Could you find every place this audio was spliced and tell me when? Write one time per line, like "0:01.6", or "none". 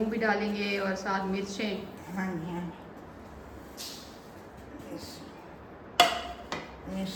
none